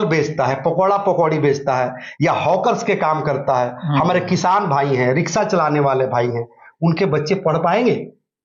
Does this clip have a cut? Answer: no; 0 cuts

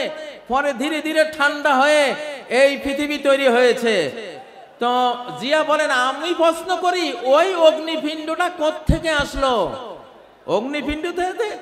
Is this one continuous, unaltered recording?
yes; 0 cuts

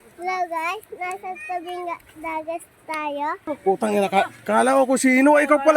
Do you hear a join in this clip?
yes; 1 cut; at 3.4 s

